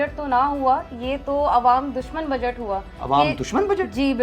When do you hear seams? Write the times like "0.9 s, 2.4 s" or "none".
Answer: none

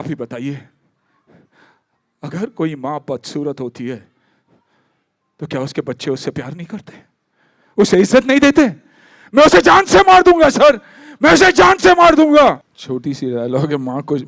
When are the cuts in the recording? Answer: 12.7 s

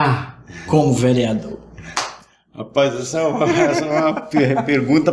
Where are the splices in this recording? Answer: none

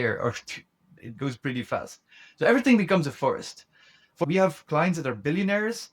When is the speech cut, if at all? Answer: 4.2 s

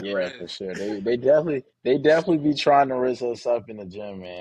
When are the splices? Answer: 1.7 s

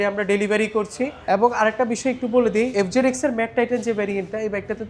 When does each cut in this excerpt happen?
1.2 s, 2.7 s

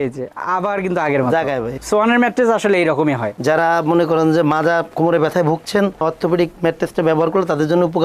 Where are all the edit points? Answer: 1.7 s, 3.3 s

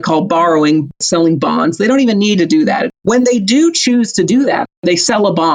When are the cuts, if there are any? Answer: 1.0 s, 2.9 s, 4.8 s

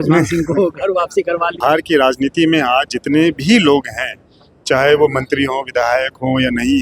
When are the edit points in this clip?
1.5 s

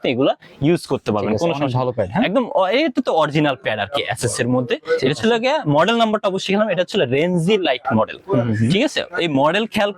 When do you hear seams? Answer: none

